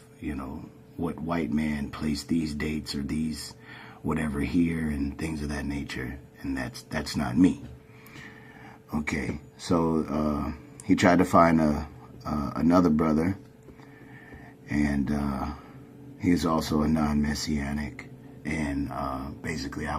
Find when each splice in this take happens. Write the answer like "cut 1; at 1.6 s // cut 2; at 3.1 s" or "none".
cut 1; at 17.2 s